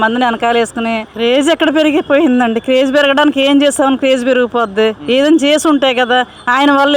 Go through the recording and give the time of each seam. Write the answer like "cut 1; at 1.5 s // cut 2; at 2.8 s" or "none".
cut 1; at 1.1 s